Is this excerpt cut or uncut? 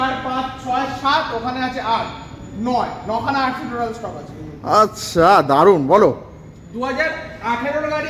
uncut